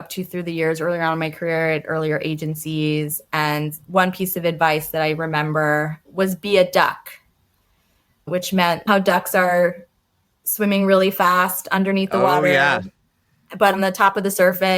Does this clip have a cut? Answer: yes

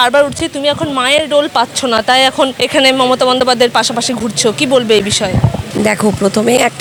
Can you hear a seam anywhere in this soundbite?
no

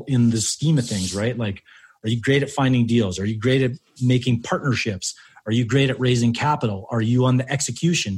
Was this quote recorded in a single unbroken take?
no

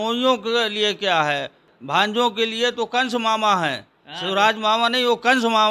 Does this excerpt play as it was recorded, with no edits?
no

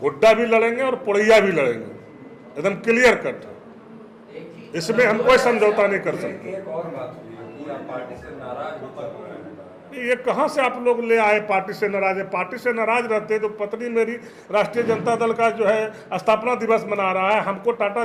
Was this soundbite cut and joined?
no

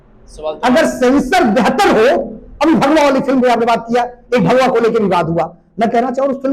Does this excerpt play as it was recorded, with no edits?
yes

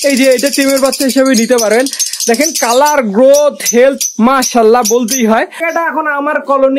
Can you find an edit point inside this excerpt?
yes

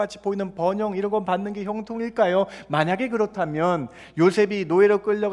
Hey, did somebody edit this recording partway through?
no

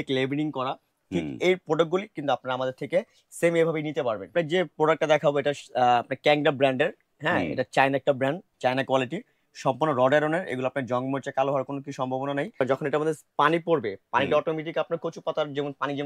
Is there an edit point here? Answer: yes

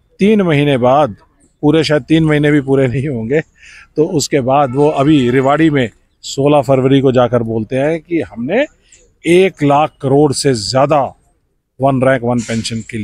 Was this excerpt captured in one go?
yes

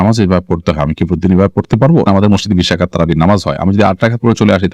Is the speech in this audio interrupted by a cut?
yes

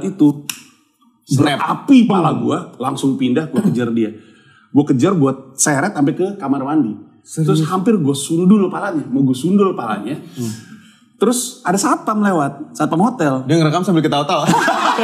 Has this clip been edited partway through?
no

